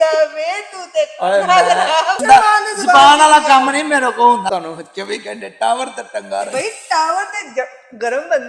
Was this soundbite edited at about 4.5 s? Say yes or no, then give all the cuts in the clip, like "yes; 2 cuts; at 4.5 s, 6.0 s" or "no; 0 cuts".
yes; 2 cuts; at 2.2 s, 4.5 s